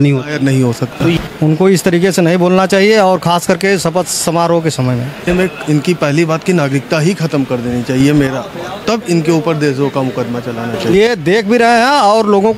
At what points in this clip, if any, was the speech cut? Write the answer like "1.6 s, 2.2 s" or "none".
1.2 s, 5.3 s, 10.9 s